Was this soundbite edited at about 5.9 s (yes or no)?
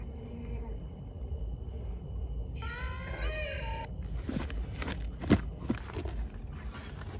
yes